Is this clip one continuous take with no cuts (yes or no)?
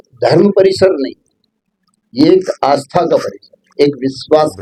yes